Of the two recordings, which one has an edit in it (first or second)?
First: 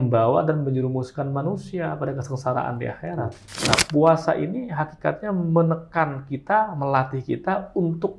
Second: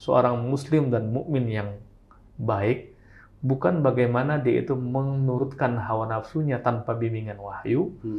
first